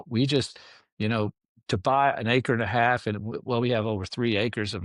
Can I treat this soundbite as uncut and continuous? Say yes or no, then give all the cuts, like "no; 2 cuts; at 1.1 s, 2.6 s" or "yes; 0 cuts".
yes; 0 cuts